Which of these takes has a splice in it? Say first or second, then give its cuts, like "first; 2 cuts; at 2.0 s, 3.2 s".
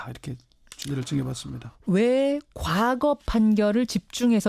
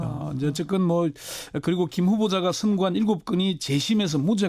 second; 1 cut; at 1.4 s